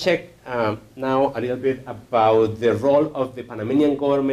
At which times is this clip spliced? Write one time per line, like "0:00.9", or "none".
0:01.9